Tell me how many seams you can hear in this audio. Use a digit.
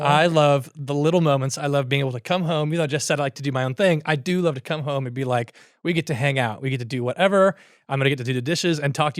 0